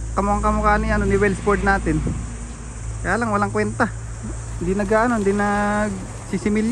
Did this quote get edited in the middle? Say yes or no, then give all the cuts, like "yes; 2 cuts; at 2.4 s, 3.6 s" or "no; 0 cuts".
no; 0 cuts